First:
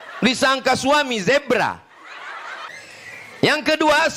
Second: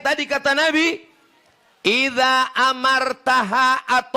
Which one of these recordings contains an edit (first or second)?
first